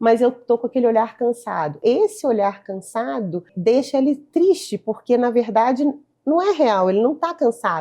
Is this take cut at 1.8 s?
yes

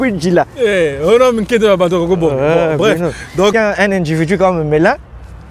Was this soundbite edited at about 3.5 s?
yes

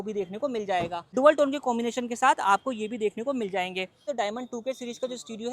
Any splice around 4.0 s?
yes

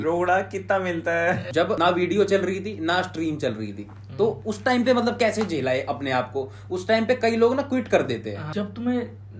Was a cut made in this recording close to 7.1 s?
no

